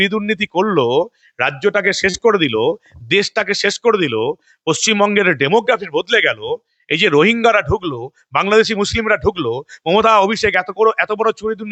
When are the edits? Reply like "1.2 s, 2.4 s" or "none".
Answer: none